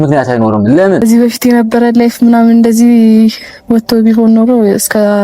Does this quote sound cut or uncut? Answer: cut